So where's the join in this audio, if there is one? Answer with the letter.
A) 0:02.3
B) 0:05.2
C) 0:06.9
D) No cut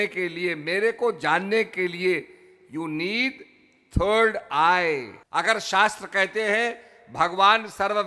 B